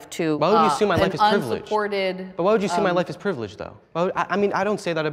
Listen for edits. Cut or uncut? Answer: cut